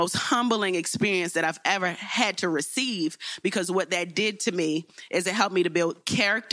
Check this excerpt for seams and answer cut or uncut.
uncut